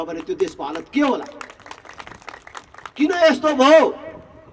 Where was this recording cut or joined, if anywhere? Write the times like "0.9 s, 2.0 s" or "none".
none